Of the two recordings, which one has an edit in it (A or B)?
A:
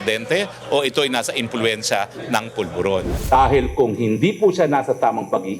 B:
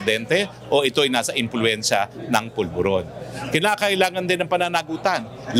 A